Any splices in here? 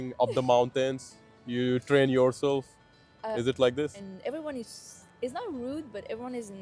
yes; 1 cut; at 4.0 s

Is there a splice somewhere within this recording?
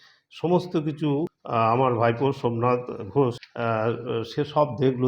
yes; 2 cuts; at 1.4 s, 3.5 s

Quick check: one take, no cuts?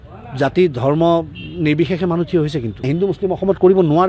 no; 1 cut; at 2.9 s

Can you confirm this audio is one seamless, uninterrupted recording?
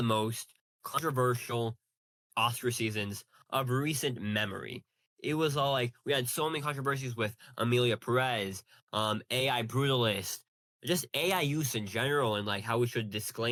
yes; 0 cuts

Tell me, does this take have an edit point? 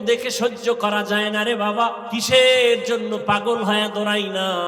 yes; 1 cut; at 2.0 s

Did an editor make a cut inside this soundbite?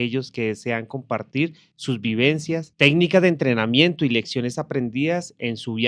yes; 1 cut; at 2.7 s

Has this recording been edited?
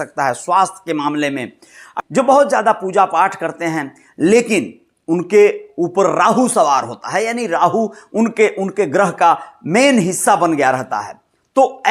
yes; 1 cut; at 1.9 s

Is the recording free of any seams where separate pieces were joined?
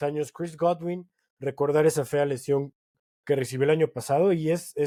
yes; 0 cuts

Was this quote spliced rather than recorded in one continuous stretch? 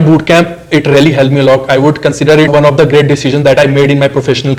no; 0 cuts

